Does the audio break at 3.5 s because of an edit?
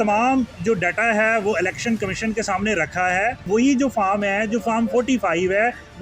yes; 1 cut; at 3.5 s

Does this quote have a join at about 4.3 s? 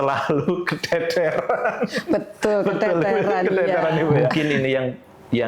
yes; 1 cut; at 4.3 s

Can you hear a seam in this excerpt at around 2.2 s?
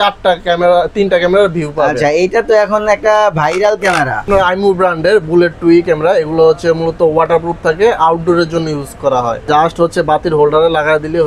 no; 2 cuts; at 4.3 s, 9.4 s

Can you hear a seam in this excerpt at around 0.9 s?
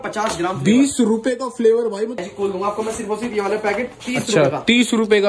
no; 2 cuts; at 2.2 s, 4.0 s

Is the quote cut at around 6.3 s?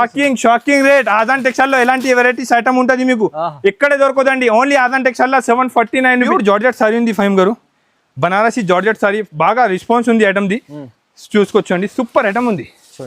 yes; 1 cut; at 6.3 s

